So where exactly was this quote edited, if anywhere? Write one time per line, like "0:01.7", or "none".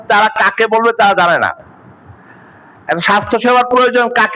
none